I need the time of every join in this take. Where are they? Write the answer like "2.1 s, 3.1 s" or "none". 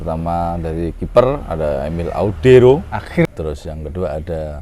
3.3 s